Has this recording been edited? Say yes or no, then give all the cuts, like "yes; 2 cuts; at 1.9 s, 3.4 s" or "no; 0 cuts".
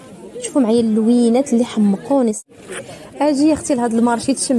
yes; 1 cut; at 2.4 s